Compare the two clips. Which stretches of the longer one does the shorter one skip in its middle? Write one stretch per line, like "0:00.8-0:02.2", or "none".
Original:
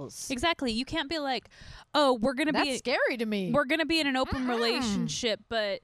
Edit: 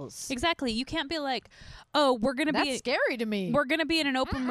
none